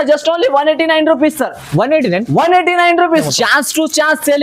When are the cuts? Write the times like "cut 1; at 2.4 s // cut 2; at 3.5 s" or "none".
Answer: cut 1; at 3.2 s